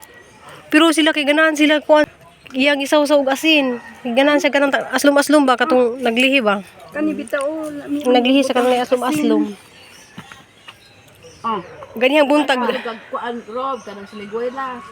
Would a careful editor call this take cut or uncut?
cut